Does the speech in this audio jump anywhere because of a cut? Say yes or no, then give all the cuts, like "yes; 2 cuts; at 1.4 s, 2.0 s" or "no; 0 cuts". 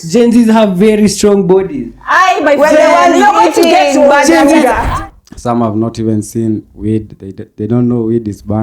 yes; 1 cut; at 4.8 s